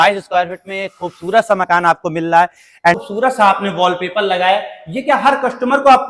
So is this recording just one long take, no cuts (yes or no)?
no